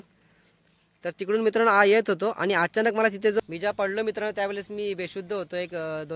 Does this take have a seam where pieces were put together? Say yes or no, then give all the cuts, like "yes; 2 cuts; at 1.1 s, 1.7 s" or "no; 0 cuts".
yes; 1 cut; at 3.4 s